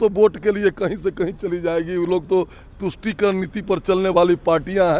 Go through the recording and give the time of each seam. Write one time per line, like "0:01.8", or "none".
none